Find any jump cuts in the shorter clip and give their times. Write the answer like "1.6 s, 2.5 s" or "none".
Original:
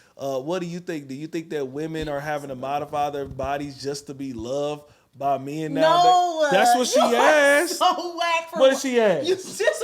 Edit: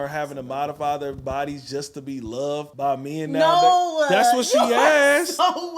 2.7 s